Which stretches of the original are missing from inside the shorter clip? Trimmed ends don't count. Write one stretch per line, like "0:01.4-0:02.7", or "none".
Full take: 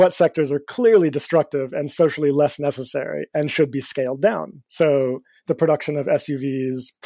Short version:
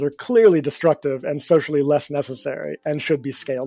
none